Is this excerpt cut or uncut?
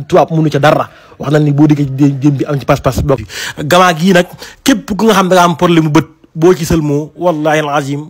cut